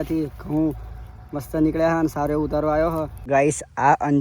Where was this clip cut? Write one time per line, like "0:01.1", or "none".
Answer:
0:03.3